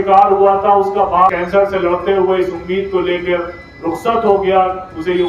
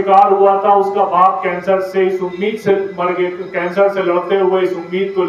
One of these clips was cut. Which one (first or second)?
first